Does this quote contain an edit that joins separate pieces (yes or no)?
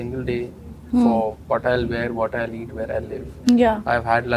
no